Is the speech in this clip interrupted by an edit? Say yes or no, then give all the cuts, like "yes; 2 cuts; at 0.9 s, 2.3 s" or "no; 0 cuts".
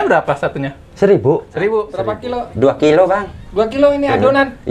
yes; 1 cut; at 1.7 s